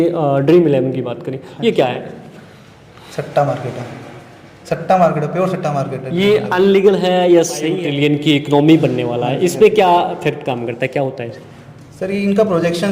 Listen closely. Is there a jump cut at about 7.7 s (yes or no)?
yes